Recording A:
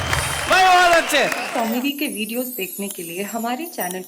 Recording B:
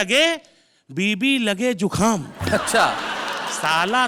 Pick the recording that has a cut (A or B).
A